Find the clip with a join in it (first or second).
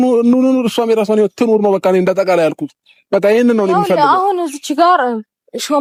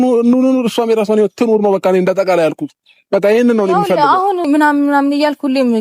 second